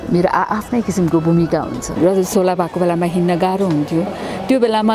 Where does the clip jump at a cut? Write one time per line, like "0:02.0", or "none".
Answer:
0:01.8